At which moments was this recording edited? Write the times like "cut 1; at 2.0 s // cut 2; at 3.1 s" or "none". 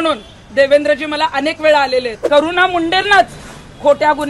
cut 1; at 2.2 s